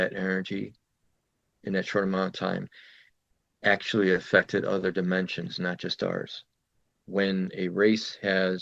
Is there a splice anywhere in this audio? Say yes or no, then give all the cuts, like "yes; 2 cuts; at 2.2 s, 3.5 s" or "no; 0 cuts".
yes; 1 cut; at 7.0 s